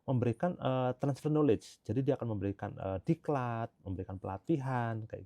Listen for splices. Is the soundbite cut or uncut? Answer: uncut